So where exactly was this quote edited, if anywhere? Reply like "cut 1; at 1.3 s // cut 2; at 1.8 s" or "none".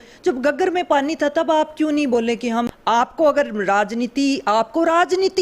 cut 1; at 2.7 s